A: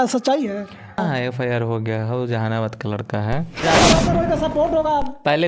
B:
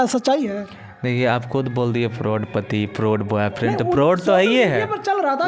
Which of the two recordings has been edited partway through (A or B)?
A